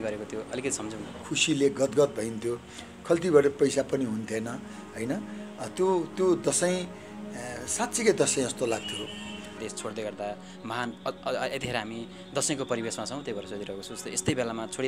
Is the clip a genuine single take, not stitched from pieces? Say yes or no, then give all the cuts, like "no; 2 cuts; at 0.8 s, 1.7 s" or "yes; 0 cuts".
no; 2 cuts; at 1.2 s, 9.6 s